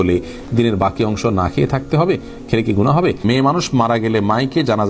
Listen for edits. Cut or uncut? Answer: cut